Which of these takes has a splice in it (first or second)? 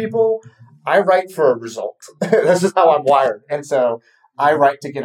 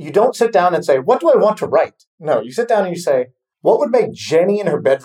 second